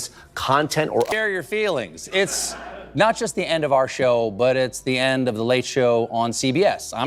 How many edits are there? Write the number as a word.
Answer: one